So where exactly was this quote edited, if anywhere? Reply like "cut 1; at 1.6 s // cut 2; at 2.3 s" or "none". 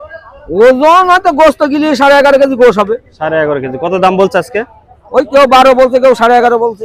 none